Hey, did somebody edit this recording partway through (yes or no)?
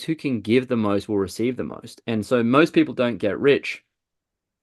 no